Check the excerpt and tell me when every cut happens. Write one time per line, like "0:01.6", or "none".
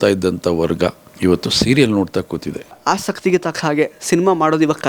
0:01.1
0:02.8